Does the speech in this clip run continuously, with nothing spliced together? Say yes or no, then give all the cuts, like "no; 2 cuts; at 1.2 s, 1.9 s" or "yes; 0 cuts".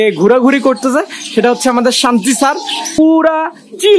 no; 1 cut; at 3.0 s